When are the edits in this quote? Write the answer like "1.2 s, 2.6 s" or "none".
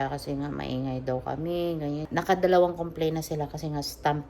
2.1 s